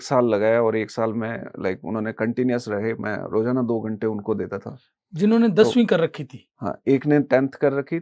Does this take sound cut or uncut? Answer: uncut